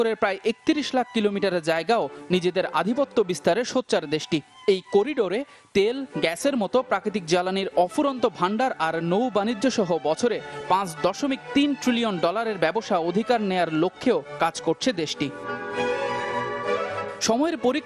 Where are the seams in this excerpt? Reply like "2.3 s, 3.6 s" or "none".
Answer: 13.5 s